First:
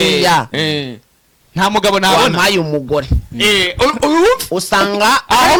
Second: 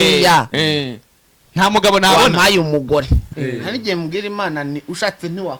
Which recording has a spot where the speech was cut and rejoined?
second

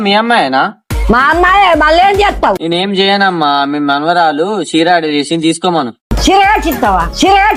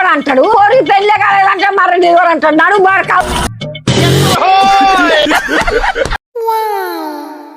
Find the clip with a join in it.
second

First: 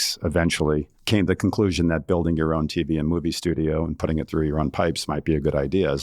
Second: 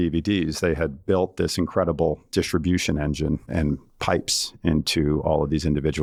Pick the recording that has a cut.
first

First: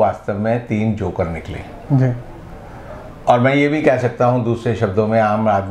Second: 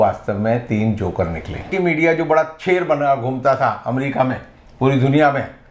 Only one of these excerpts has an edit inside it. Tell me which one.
second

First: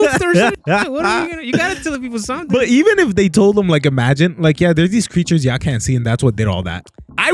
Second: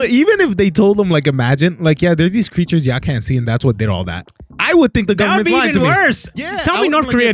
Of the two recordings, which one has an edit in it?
second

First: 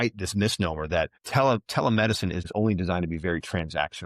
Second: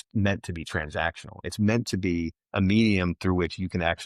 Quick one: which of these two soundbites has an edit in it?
first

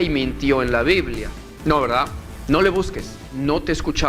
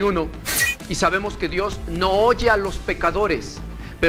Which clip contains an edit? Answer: first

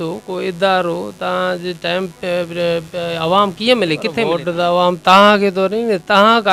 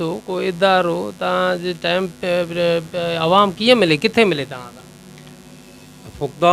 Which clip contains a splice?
first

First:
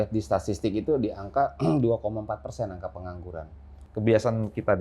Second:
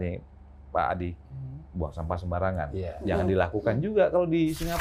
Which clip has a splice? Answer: first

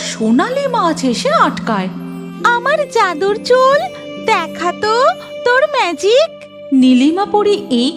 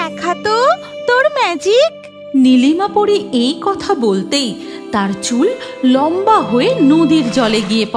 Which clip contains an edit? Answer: first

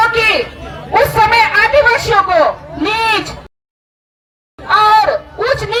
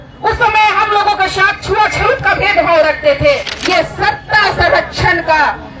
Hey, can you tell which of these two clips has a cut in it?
second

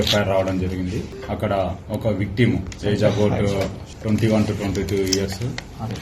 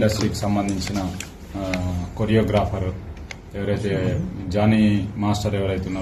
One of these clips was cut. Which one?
first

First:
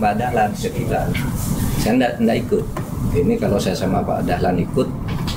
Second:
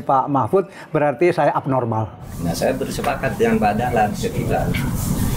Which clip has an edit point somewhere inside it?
second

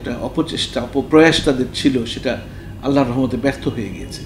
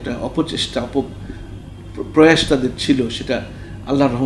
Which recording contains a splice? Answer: first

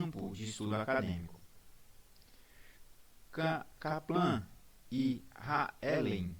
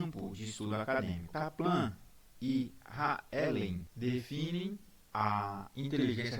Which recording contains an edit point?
second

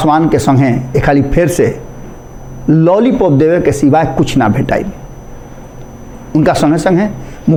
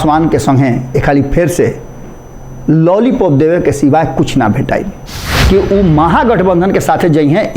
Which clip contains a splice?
second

